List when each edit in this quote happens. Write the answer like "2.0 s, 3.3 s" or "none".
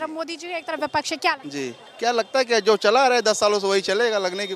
1.8 s